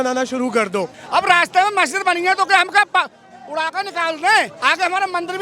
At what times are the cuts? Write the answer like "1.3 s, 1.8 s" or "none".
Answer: 1.0 s

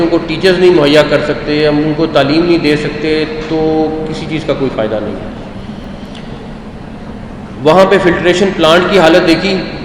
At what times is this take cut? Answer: none

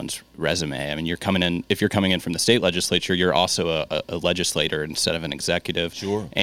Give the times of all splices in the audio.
1.6 s

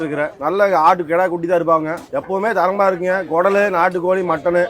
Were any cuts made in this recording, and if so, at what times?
none

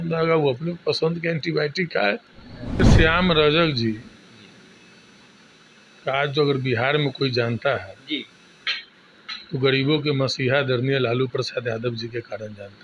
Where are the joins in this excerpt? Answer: 2.8 s

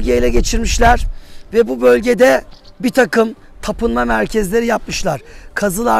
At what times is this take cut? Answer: none

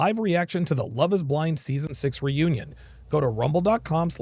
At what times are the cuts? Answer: none

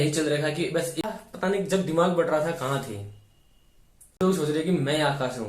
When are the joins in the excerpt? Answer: 1.1 s, 4.2 s

